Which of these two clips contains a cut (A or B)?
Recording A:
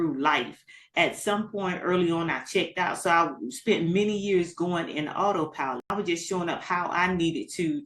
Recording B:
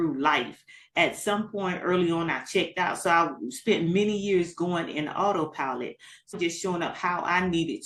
A